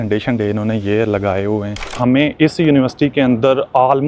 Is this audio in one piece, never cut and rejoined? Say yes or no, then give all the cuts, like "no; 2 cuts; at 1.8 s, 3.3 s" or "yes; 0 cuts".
no; 1 cut; at 2.0 s